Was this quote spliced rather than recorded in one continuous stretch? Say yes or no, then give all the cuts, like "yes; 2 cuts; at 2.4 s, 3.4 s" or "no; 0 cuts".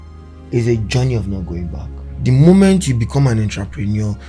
yes; 1 cut; at 2.0 s